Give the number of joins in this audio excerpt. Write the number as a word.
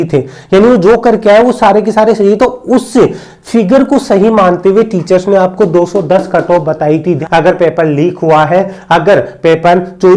one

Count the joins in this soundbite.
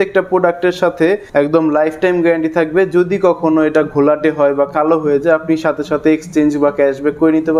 one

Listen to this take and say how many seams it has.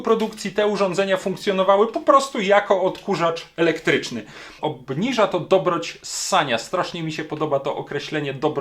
one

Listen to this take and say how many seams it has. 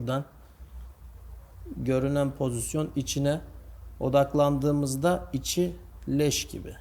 zero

